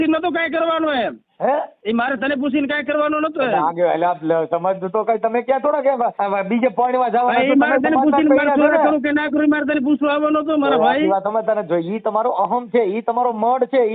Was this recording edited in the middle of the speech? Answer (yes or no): yes